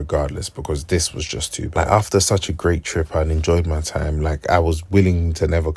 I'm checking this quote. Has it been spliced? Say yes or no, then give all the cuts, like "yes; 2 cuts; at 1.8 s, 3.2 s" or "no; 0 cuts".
no; 0 cuts